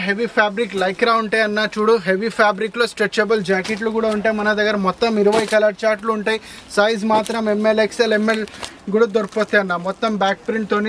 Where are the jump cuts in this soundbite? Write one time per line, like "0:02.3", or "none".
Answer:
none